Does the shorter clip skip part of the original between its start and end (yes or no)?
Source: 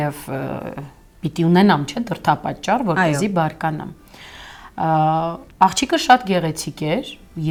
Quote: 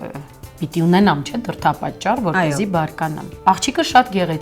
yes